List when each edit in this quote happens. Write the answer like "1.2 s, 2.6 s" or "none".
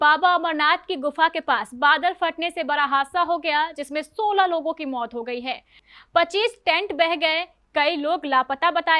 5.8 s